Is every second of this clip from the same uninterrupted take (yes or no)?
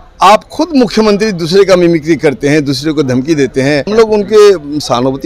no